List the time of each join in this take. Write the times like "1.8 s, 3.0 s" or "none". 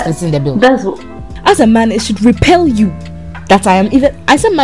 1.3 s